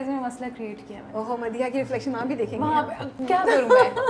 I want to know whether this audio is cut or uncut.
cut